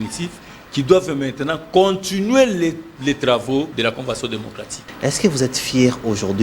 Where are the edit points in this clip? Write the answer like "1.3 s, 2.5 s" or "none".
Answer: 3.7 s, 4.9 s